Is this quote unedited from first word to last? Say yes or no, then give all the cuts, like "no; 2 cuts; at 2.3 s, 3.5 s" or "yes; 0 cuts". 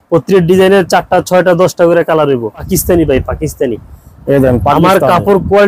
no; 1 cut; at 2.7 s